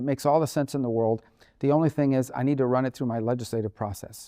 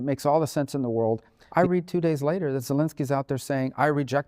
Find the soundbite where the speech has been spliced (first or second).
second